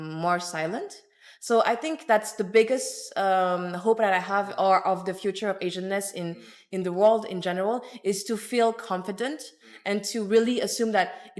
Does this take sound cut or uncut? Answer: uncut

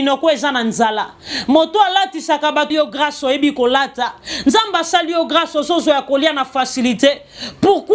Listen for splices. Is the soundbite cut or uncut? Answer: cut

